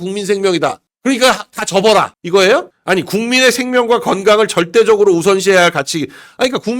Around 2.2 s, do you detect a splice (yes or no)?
yes